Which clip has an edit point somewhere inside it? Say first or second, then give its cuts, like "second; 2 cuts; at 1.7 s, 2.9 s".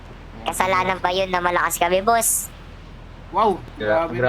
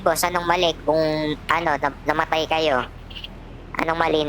first; 1 cut; at 2.8 s